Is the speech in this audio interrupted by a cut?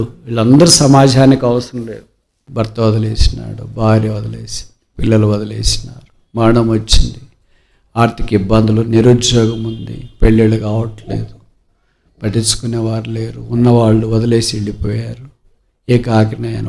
yes; 1 cut; at 2.4 s

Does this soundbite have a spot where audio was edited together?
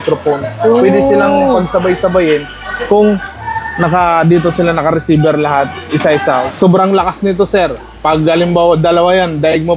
yes; 1 cut; at 6.4 s

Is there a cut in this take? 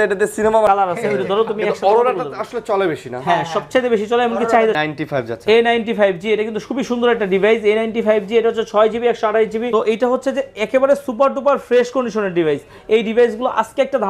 yes; 3 cuts; at 0.7 s, 4.8 s, 9.7 s

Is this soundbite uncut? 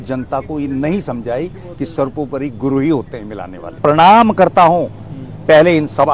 no; 1 cut; at 3.8 s

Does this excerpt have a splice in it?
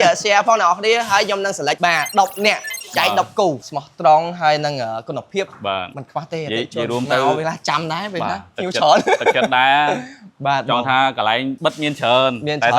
yes; 1 cut; at 3.6 s

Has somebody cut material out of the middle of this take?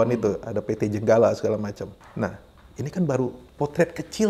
yes; 2 cuts; at 2.0 s, 3.4 s

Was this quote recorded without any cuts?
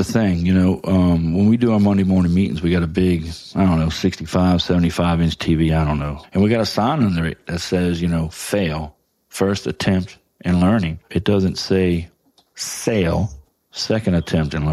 no; 2 cuts; at 6.2 s, 11.0 s

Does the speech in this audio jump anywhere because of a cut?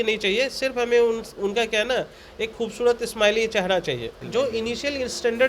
yes; 1 cut; at 4.2 s

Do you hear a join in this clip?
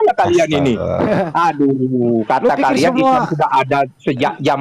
no; 0 cuts

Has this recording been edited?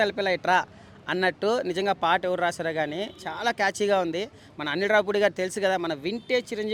no; 0 cuts

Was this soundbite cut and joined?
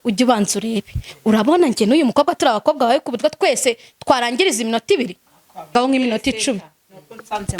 yes; 1 cut; at 5.7 s

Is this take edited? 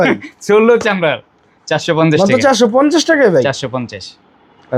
no; 0 cuts

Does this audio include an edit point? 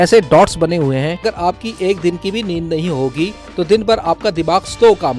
yes; 1 cut; at 1.2 s

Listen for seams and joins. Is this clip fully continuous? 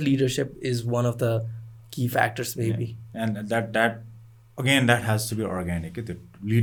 yes; 0 cuts

